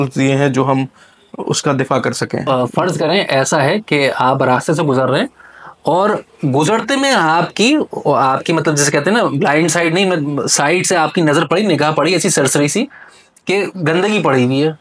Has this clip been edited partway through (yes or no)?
yes